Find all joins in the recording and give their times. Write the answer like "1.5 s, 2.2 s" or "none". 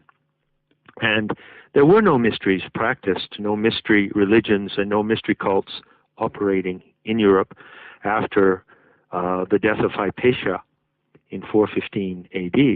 9.8 s